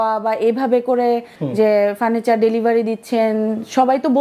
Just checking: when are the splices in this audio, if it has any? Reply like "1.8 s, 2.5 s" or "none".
1.4 s